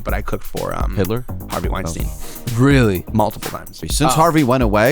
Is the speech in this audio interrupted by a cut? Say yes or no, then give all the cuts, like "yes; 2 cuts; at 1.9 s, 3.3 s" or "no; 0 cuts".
yes; 1 cut; at 3.8 s